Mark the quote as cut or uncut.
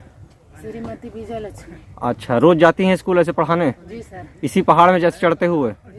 uncut